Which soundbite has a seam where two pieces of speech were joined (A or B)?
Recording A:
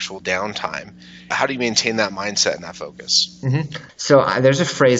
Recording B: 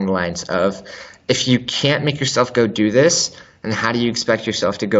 A